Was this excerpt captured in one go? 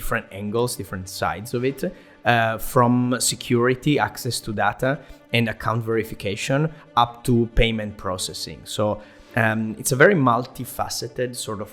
yes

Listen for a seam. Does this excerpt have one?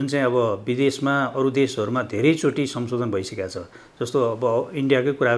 no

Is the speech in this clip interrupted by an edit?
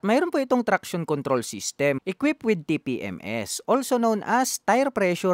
yes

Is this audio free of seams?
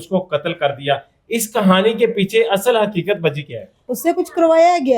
no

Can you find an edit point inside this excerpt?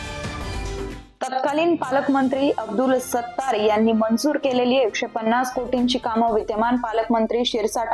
yes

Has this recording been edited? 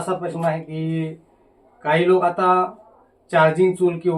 no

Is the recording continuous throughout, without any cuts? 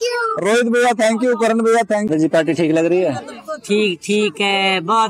no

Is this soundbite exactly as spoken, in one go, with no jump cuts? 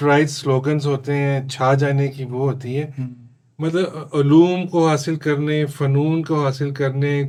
yes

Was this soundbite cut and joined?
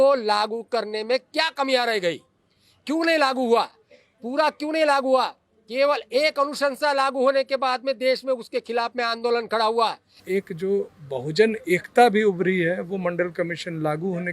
yes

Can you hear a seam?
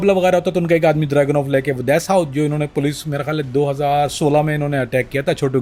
no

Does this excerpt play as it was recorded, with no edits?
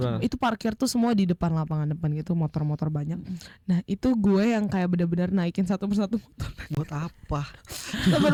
yes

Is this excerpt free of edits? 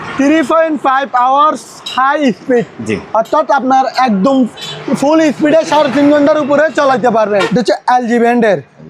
no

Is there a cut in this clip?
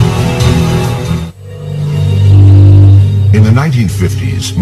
yes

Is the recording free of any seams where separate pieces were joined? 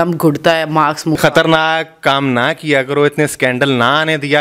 no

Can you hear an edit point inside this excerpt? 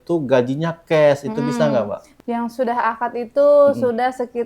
yes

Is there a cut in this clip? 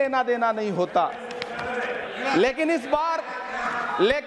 no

